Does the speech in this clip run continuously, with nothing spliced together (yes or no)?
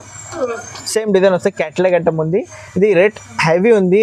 yes